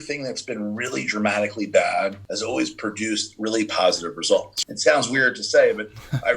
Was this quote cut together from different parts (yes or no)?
yes